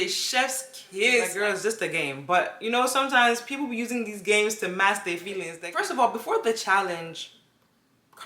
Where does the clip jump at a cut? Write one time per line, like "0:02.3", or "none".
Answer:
0:01.3
0:05.6